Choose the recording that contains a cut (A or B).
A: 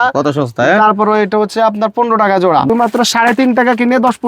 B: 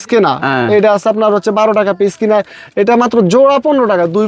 A